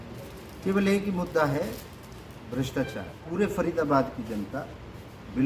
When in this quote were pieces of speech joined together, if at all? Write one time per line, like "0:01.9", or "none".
0:03.2